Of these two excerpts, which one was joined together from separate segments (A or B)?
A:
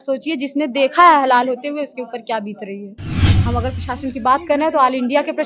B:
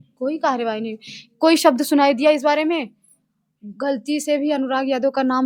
A